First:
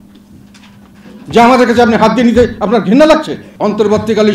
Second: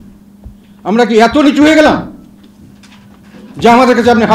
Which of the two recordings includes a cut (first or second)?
first